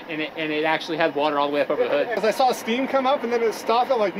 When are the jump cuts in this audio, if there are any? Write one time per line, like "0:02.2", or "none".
0:02.2